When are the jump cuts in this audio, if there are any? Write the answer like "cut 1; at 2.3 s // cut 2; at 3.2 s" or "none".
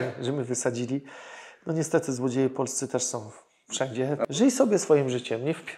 cut 1; at 4.2 s